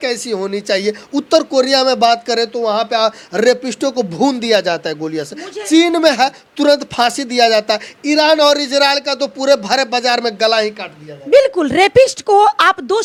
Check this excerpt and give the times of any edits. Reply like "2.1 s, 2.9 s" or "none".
none